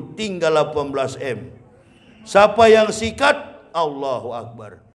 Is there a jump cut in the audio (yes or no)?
no